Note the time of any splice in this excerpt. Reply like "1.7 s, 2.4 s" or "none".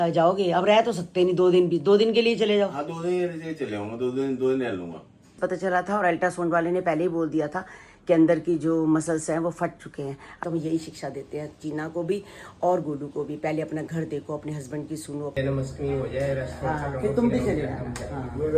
5.4 s, 10.4 s, 15.3 s